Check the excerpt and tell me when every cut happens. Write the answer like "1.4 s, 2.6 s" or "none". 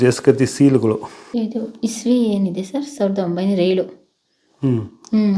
1.2 s